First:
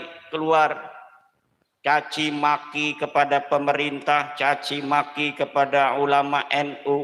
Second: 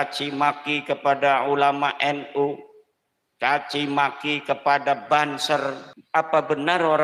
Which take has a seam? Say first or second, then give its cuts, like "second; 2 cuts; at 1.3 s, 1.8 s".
second; 1 cut; at 5.9 s